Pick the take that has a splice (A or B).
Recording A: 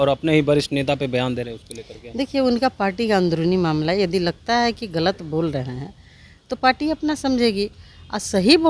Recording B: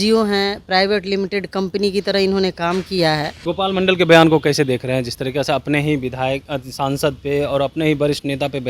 B